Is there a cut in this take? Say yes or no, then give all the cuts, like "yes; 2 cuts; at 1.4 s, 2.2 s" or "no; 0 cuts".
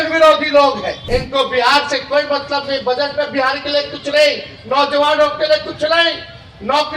yes; 1 cut; at 0.9 s